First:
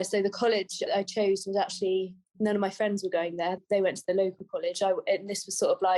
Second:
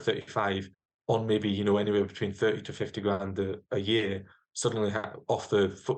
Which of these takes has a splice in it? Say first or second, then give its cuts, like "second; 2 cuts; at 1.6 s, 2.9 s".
first; 2 cuts; at 0.9 s, 3.6 s